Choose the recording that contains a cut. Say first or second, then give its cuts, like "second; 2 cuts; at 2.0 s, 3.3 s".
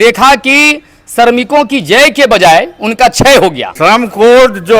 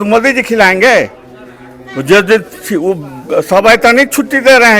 first; 1 cut; at 3.7 s